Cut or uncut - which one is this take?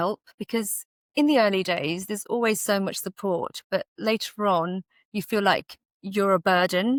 uncut